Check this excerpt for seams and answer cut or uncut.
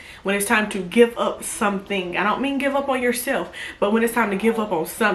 uncut